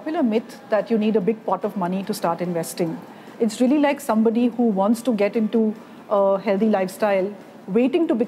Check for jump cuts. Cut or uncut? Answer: uncut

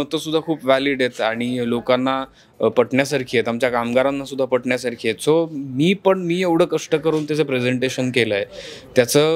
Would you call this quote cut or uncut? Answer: uncut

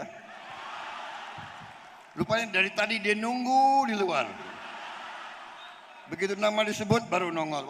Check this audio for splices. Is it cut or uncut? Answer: uncut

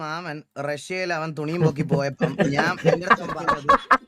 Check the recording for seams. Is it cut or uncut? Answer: uncut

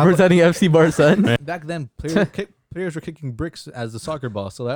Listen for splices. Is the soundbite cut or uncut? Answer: cut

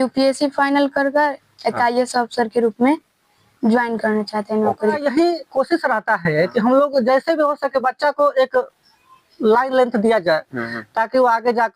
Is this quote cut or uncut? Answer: cut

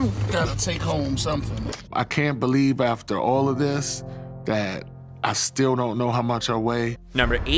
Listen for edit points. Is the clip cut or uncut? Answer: uncut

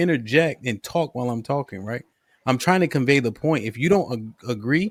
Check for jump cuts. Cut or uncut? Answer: uncut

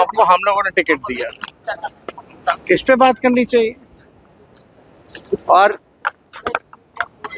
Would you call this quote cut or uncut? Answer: uncut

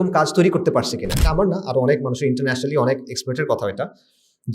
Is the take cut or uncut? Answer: cut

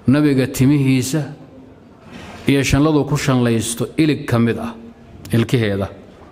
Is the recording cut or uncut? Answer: uncut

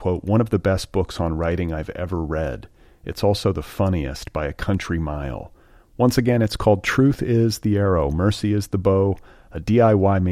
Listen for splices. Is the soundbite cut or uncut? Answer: uncut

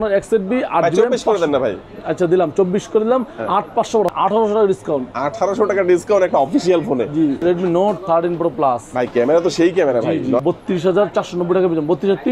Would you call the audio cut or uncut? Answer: cut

